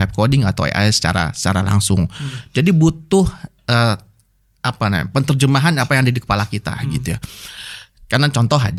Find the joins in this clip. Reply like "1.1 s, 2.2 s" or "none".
none